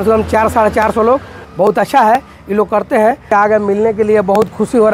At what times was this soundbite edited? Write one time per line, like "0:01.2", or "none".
0:01.4
0:03.3